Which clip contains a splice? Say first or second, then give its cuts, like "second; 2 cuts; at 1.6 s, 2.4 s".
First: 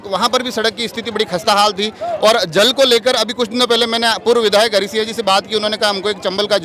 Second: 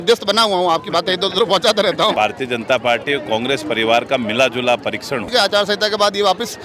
second; 2 cuts; at 2.1 s, 5.3 s